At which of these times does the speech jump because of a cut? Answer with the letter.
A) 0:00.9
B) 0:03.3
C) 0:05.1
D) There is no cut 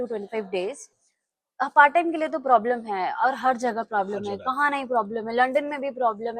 A